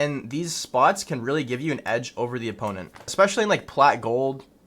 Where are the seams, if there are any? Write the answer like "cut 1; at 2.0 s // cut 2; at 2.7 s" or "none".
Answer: cut 1; at 3.1 s